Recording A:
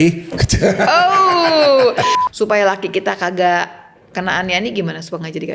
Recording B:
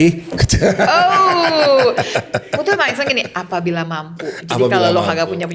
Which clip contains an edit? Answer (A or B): A